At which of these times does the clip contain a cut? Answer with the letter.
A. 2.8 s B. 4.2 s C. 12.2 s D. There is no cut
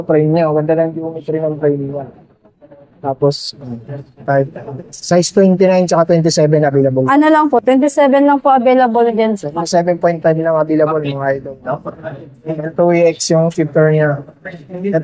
B